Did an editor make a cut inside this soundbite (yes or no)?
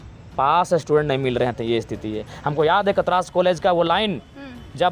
no